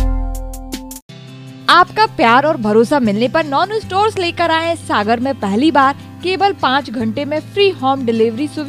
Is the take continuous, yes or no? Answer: yes